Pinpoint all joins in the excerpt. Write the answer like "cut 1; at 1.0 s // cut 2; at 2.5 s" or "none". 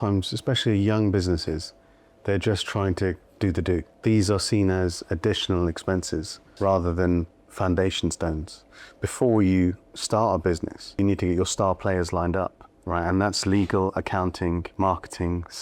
cut 1; at 3.9 s // cut 2; at 6.5 s // cut 3; at 8.5 s // cut 4; at 11.0 s // cut 5; at 12.7 s // cut 6; at 14.7 s